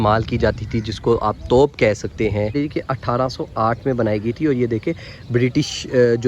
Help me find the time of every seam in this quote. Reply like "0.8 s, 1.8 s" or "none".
2.5 s